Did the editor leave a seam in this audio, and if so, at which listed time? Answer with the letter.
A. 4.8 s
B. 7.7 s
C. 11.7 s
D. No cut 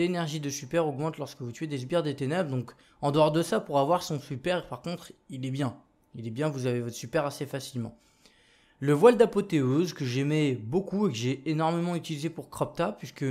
B